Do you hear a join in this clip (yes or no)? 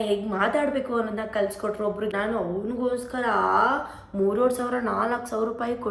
yes